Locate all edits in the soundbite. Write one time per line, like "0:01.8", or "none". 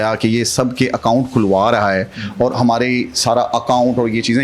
none

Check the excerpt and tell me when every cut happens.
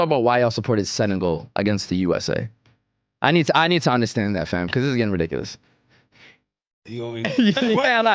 none

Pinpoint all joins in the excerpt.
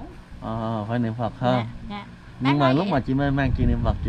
none

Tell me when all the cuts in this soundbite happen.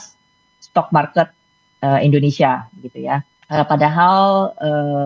0:03.3

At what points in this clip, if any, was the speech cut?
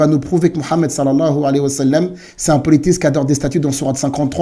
none

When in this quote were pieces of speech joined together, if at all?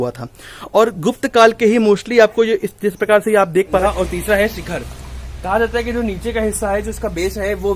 0:03.8

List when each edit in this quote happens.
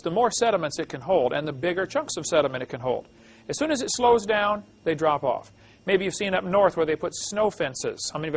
0:05.2

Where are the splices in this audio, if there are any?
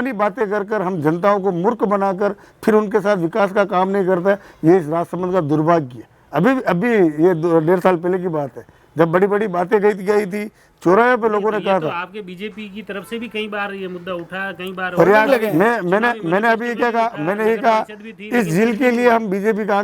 none

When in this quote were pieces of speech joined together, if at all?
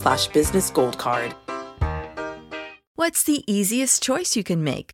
0:03.0

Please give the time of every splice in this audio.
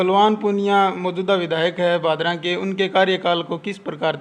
none

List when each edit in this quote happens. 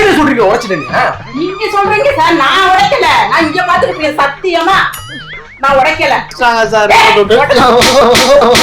0:06.3

